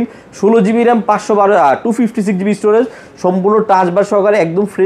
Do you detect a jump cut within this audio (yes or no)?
no